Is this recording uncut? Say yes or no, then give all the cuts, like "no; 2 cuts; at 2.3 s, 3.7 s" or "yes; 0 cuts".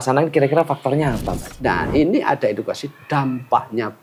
no; 1 cut; at 1.4 s